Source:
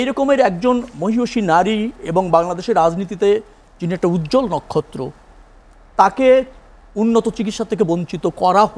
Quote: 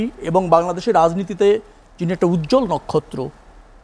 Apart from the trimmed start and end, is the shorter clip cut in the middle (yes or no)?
no